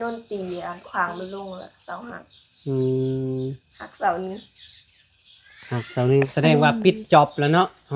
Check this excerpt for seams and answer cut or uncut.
cut